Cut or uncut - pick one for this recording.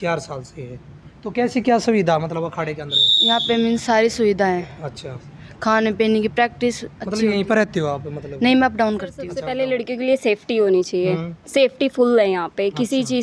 cut